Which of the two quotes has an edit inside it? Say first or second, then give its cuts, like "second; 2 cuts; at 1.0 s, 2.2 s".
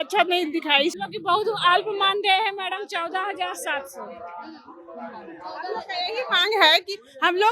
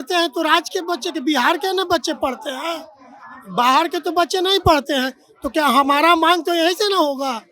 first; 1 cut; at 0.9 s